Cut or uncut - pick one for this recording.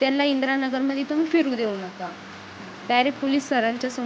uncut